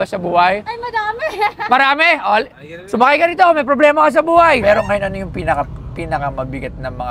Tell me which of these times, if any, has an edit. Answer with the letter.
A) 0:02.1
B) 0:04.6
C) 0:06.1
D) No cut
B